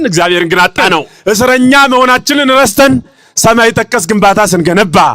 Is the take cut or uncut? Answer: cut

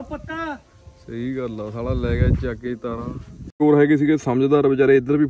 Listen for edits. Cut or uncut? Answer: cut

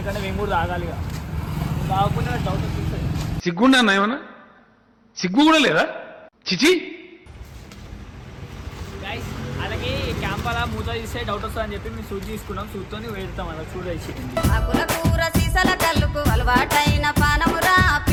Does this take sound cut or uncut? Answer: uncut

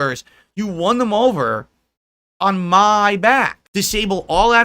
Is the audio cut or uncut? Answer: cut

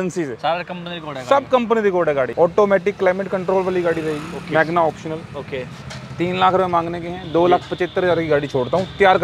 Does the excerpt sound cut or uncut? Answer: cut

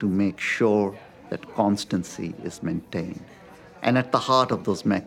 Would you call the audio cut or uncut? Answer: cut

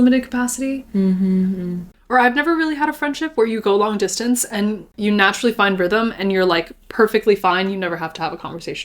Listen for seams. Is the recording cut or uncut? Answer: cut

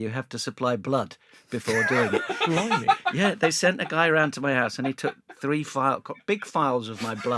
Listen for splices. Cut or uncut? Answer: uncut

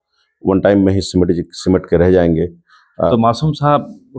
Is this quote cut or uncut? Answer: cut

